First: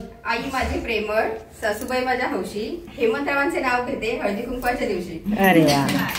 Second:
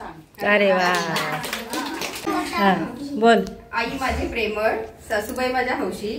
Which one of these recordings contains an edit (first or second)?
second